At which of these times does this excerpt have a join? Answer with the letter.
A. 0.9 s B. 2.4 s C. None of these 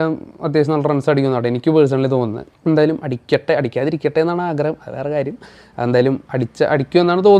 B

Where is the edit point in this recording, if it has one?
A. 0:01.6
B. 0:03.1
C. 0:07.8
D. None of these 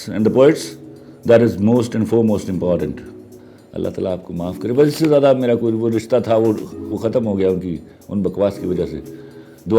B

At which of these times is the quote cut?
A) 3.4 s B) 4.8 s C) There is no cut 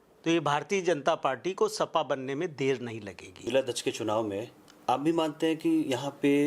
A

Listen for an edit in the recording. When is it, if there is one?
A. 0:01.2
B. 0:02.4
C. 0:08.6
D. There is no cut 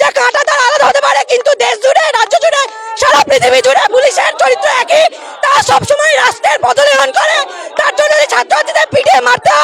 D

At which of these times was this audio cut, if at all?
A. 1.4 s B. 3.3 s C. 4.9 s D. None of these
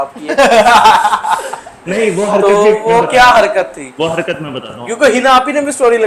D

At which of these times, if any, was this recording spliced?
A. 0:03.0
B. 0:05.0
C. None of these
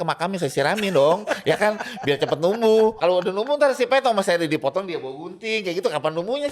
A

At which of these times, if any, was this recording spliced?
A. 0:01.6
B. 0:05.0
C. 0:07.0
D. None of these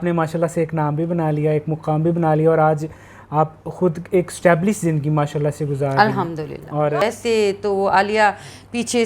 C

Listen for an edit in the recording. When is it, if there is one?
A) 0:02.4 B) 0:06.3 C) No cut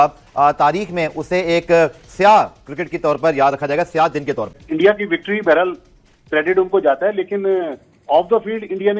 C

